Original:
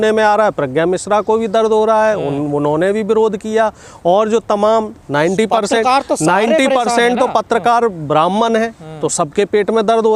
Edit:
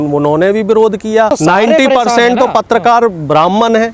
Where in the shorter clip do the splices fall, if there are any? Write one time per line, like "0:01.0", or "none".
0:01.3